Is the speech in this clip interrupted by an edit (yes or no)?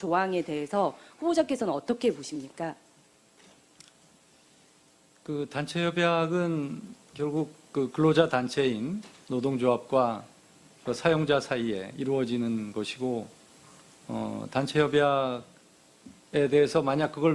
yes